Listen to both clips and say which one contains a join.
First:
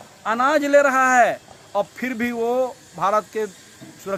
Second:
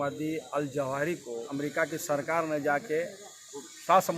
second; 1 cut; at 1.5 s

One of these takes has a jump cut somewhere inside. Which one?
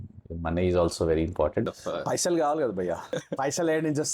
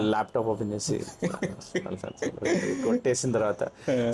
first; 2 cuts; at 1.7 s, 3.1 s

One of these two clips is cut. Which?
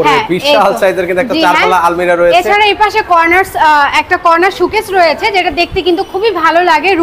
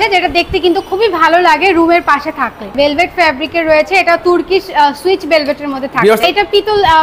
second; 2 cuts; at 2.7 s, 6.2 s

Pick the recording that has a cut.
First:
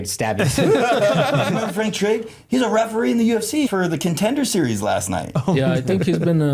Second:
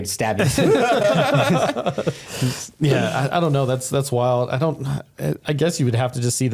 first; 2 cuts; at 1.7 s, 3.7 s

